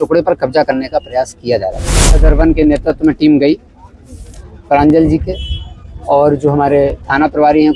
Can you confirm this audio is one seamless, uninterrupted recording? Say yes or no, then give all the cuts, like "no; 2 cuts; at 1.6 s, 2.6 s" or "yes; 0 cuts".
no; 1 cut; at 2.1 s